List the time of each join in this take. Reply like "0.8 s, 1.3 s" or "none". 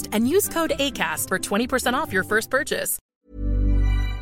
3.3 s

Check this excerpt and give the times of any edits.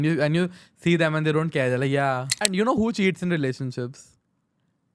2.4 s

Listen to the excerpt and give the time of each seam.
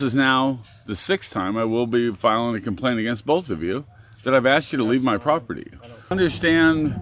6.1 s

